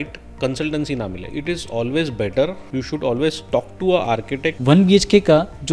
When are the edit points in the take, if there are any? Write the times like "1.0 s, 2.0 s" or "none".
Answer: 1.2 s, 2.6 s, 4.5 s